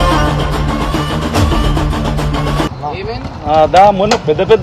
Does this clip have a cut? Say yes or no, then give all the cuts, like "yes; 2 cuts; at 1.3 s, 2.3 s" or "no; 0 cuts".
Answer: yes; 1 cut; at 2.7 s